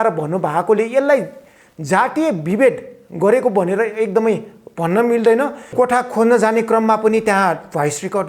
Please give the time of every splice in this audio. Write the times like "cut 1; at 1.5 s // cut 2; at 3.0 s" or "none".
cut 1; at 5.7 s